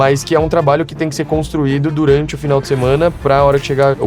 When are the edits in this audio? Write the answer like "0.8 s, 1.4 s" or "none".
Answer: none